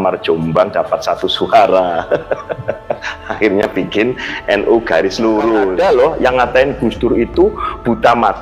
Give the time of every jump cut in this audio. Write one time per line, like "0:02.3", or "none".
0:05.7